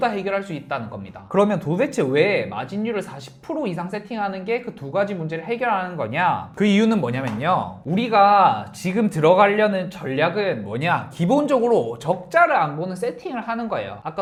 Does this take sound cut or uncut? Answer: uncut